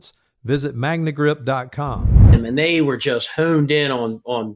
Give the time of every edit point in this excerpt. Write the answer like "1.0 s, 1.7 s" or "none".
2.2 s